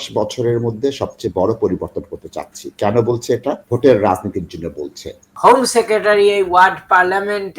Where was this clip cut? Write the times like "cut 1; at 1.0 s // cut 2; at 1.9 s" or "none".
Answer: cut 1; at 3.6 s // cut 2; at 5.3 s

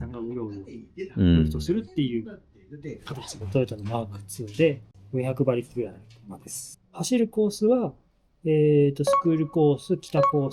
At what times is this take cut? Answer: cut 1; at 3.4 s // cut 2; at 6.7 s

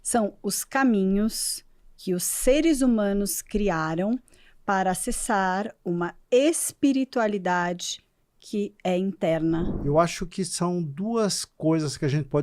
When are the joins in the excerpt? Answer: cut 1; at 9.7 s

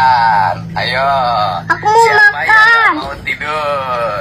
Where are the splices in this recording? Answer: none

